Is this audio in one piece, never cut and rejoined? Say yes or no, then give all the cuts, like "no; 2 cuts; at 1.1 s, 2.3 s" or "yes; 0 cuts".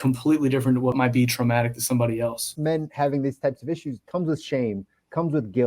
no; 3 cuts; at 0.9 s, 2.5 s, 4.0 s